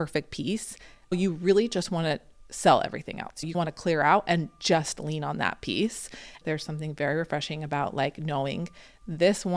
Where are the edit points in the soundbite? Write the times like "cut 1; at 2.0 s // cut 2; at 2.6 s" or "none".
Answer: cut 1; at 1.1 s // cut 2; at 3.5 s // cut 3; at 6.4 s